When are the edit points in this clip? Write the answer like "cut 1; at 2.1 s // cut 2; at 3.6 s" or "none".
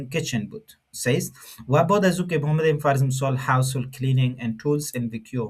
none